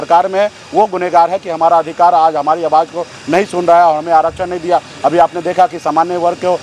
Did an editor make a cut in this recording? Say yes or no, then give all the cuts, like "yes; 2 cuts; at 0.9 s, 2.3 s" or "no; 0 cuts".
no; 0 cuts